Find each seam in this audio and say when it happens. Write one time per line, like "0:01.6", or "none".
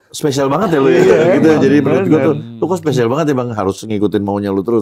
none